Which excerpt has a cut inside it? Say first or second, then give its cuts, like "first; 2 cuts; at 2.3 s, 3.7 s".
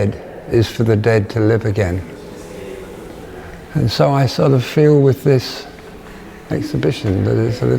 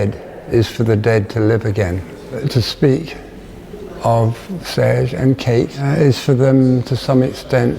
second; 2 cuts; at 2.4 s, 5.8 s